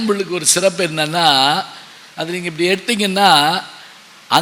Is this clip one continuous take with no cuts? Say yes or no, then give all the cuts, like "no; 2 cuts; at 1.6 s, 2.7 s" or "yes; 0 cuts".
yes; 0 cuts